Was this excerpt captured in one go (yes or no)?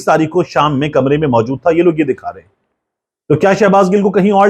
yes